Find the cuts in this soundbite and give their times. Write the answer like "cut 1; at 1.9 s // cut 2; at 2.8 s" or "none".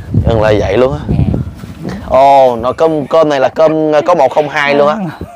cut 1; at 1.4 s